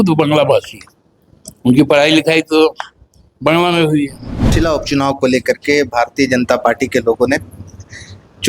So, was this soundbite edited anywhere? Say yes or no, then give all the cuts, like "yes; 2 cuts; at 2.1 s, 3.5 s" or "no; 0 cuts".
yes; 1 cut; at 4.5 s